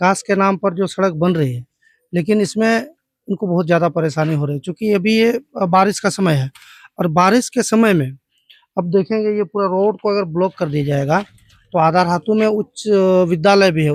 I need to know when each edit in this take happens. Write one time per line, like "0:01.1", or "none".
none